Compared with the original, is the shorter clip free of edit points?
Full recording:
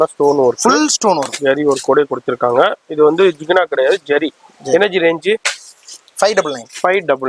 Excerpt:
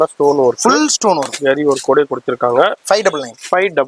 no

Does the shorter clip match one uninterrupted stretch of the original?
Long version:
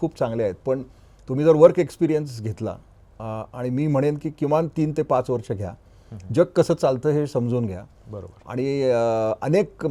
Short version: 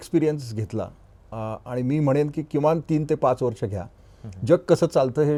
yes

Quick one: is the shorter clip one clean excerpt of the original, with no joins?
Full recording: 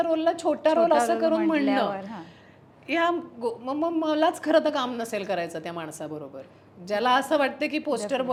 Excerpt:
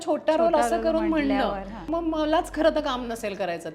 no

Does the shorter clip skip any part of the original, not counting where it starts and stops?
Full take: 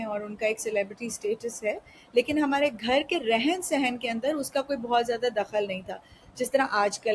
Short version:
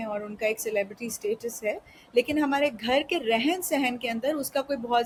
no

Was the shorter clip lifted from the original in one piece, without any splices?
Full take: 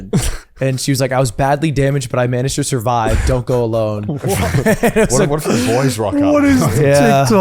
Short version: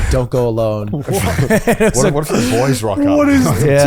yes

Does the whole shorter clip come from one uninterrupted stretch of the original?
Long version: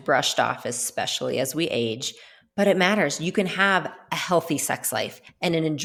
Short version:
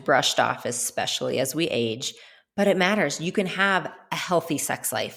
yes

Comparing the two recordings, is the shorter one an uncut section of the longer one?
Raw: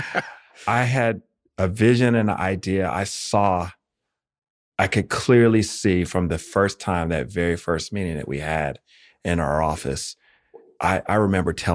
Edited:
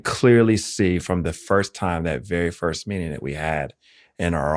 yes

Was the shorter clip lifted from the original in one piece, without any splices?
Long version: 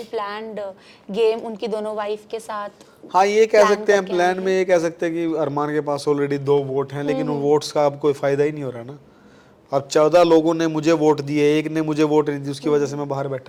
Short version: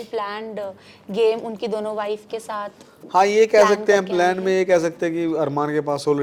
yes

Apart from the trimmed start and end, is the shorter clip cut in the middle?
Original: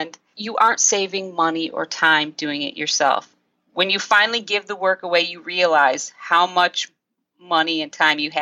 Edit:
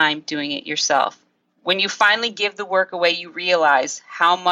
no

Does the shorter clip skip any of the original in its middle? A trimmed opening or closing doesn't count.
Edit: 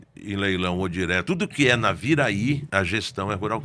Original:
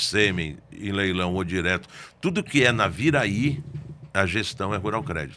yes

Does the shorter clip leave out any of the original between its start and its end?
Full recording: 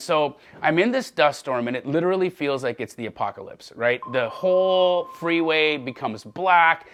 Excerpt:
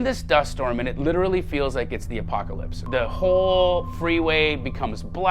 yes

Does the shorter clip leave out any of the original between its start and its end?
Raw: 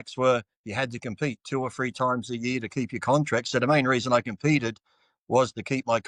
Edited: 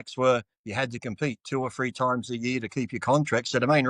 no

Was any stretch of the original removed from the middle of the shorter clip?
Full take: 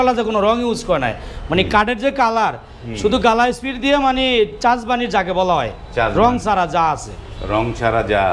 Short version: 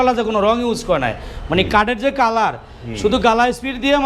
no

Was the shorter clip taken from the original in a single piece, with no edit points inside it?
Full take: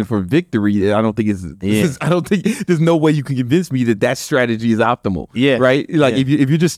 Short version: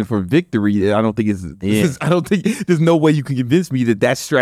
yes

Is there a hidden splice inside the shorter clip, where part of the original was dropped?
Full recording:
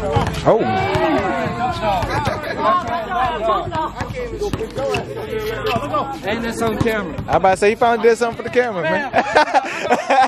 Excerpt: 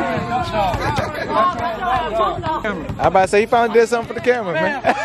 yes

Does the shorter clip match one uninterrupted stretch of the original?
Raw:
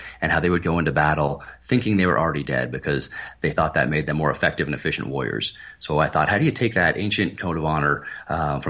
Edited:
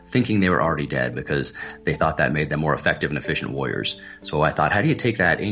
yes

